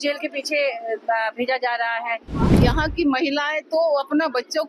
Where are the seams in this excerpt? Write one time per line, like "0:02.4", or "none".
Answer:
0:02.5